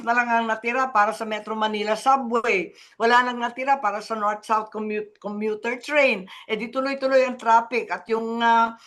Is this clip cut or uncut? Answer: uncut